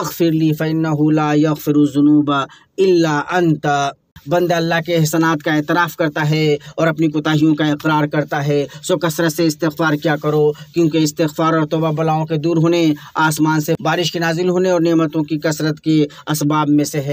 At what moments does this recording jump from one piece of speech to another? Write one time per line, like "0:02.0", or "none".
0:04.1
0:13.8